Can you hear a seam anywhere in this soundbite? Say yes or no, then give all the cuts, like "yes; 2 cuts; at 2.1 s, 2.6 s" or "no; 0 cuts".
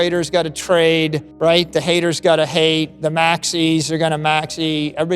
yes; 1 cut; at 1.2 s